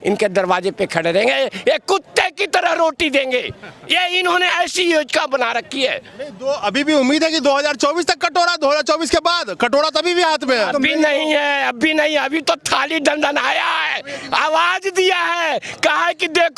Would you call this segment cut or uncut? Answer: uncut